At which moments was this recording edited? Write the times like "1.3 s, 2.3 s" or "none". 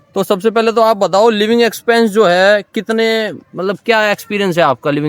none